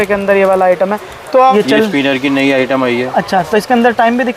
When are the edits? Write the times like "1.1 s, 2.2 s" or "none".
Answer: 1.5 s